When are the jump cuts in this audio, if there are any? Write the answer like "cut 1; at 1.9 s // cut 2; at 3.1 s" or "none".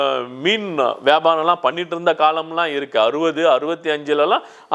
none